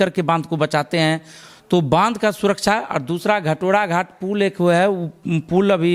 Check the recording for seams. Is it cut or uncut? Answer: uncut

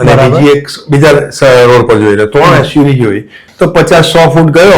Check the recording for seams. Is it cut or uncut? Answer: cut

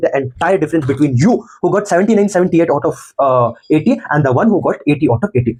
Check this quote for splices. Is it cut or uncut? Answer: uncut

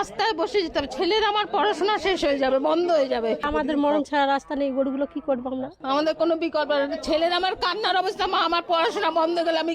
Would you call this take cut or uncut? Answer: cut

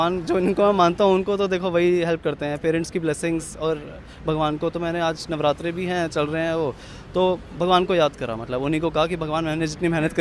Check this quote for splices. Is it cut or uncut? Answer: uncut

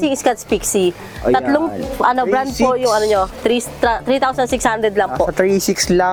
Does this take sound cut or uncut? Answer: uncut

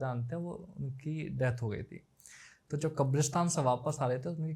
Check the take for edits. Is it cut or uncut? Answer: uncut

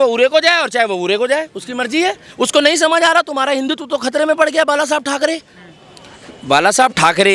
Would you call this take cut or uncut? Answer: uncut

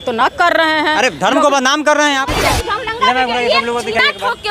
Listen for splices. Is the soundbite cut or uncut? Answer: cut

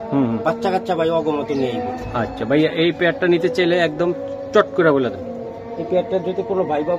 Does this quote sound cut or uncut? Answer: uncut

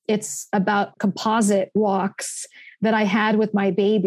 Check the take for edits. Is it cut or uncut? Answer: cut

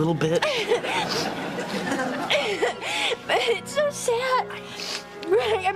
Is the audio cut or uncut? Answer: cut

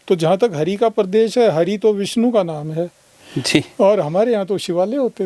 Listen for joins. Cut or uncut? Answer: uncut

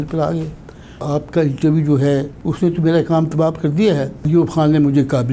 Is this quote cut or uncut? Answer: cut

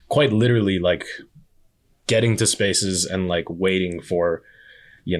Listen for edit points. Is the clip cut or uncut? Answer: uncut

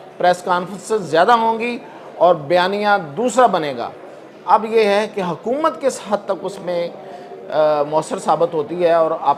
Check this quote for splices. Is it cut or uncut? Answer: uncut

